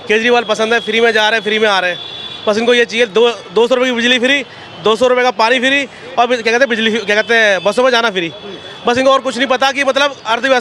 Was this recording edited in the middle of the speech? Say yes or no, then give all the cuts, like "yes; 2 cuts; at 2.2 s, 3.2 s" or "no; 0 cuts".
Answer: no; 0 cuts